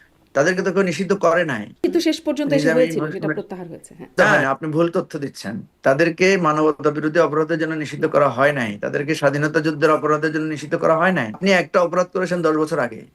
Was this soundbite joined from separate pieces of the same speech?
yes; 3 cuts; at 1.8 s, 4.1 s, 11.4 s

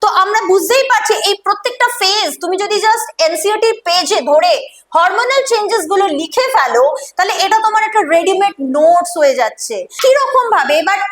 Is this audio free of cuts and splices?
no; 1 cut; at 9.8 s

